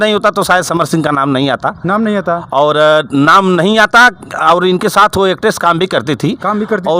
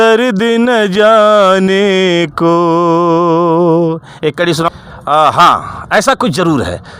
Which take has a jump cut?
second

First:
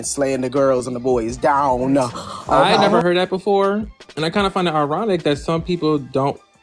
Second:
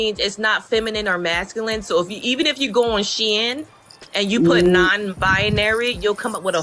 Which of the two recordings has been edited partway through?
first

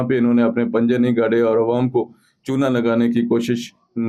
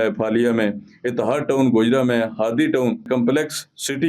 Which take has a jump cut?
second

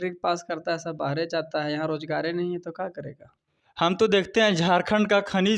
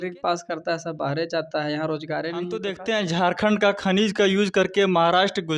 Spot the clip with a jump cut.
second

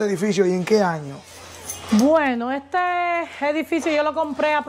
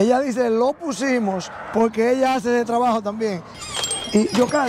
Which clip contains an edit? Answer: second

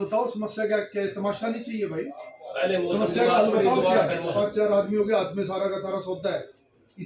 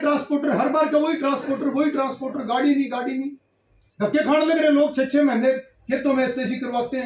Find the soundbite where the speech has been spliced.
first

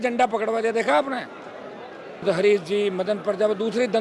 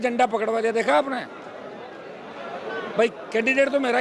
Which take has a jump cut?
first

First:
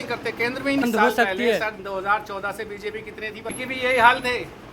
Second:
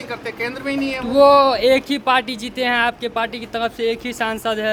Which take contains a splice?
first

